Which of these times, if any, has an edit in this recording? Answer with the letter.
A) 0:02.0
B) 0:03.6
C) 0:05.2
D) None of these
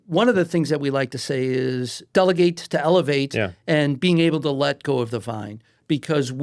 A